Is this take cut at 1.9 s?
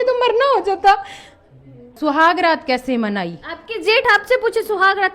yes; 1 cut; at 1.9 s

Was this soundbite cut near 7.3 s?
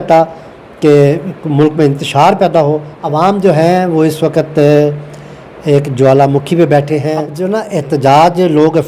yes; 2 cuts; at 2.9 s, 7.3 s

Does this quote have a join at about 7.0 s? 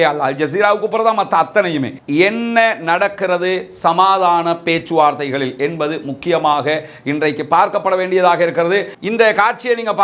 no; 2 cuts; at 2.0 s, 8.9 s

